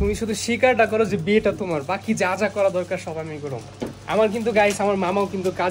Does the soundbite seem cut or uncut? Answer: uncut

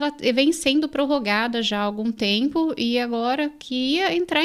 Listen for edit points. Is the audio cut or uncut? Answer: uncut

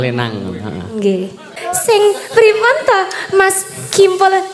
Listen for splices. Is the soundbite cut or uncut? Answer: cut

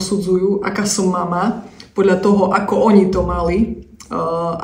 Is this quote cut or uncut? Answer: uncut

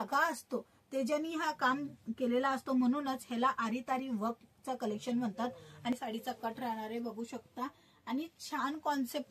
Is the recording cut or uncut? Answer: cut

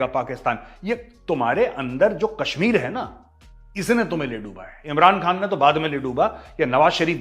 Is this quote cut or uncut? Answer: uncut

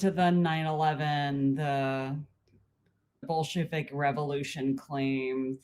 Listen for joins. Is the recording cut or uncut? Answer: cut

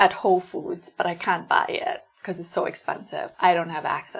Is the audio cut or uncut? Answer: uncut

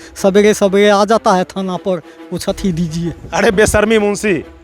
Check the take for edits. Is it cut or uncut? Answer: cut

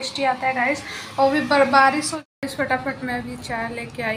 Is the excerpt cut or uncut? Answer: cut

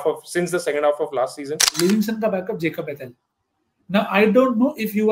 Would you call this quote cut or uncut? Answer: cut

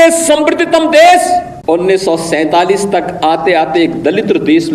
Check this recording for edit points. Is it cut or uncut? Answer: cut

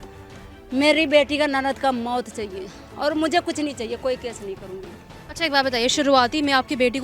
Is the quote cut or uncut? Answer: uncut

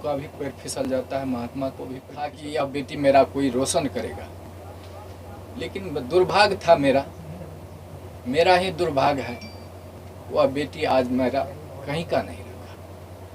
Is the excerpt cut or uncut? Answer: cut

